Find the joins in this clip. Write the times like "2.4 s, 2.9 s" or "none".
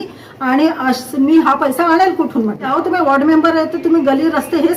2.7 s

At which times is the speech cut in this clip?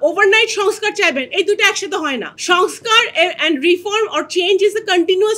none

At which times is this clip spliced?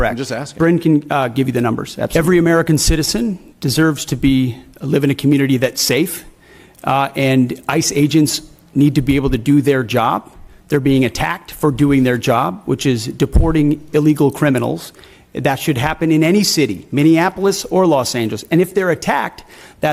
2.1 s

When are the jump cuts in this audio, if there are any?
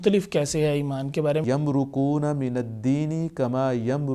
1.4 s

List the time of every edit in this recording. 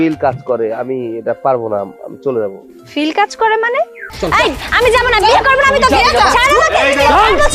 4.1 s

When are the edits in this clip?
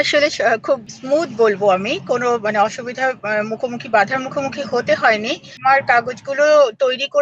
0.9 s, 5.5 s

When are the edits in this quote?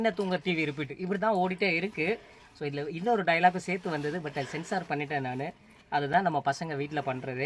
none

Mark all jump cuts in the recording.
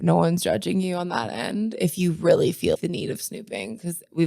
2.8 s

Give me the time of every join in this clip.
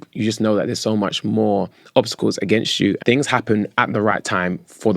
3.0 s

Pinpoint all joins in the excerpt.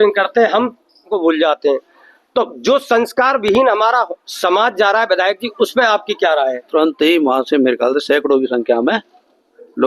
1.1 s, 6.6 s

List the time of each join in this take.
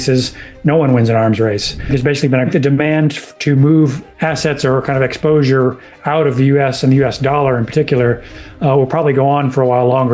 2.0 s, 4.0 s

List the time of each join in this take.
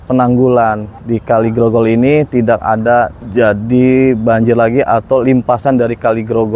0.9 s, 3.2 s

